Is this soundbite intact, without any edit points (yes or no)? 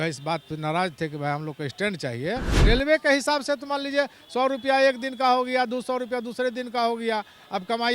no